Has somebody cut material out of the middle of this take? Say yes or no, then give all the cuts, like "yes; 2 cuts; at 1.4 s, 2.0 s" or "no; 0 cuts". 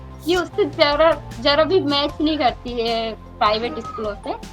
no; 0 cuts